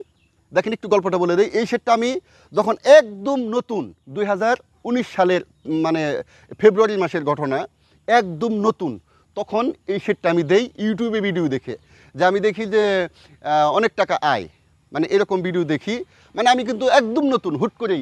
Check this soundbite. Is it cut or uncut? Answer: uncut